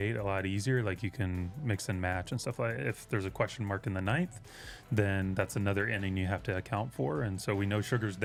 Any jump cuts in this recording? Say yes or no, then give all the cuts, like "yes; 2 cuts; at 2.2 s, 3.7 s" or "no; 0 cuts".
no; 0 cuts